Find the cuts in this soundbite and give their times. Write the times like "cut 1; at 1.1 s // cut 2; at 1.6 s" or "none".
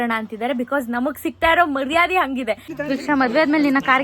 cut 1; at 2.7 s